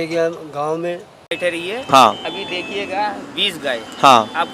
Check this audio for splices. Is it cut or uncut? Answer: cut